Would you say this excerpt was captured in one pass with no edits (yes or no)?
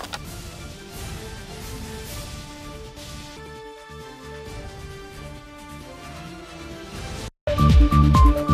no